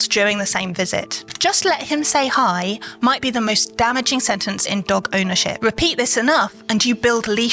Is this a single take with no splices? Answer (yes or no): no